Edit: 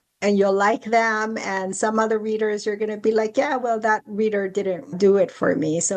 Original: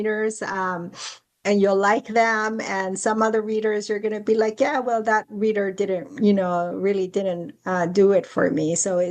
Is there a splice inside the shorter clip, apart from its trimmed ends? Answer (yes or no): yes